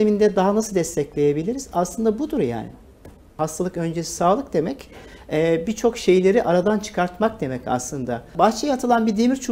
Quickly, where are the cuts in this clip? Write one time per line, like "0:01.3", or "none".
0:03.4
0:08.3